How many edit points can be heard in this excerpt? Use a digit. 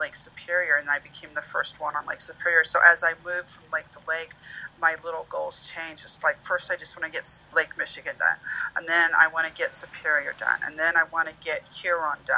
1